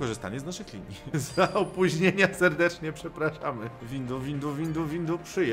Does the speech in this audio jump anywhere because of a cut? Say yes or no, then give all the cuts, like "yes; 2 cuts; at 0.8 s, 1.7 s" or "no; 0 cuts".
yes; 2 cuts; at 1.1 s, 3.8 s